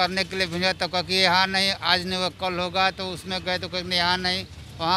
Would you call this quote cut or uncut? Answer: uncut